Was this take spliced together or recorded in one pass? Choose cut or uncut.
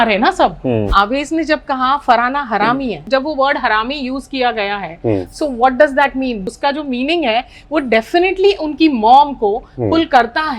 cut